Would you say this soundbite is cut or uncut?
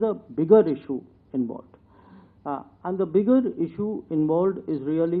uncut